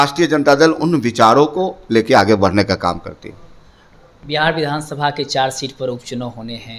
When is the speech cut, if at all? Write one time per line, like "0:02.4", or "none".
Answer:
none